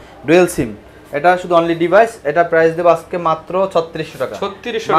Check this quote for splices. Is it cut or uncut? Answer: uncut